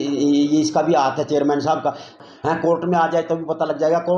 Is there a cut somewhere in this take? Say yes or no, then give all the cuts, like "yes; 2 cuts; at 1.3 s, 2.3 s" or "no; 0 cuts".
yes; 1 cut; at 2.2 s